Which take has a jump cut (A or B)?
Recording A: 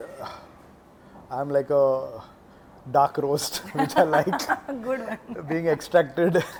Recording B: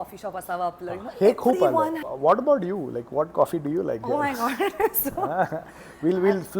B